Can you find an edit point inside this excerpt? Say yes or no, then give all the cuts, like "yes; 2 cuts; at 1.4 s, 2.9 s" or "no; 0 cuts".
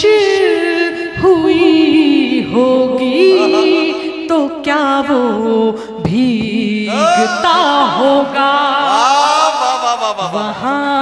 no; 0 cuts